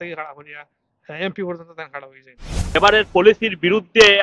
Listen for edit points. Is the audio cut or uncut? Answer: cut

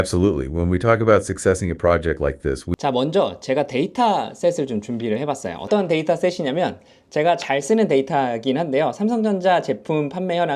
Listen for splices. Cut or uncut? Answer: cut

